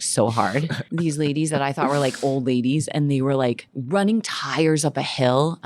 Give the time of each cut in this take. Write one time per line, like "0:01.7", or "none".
0:00.8
0:03.7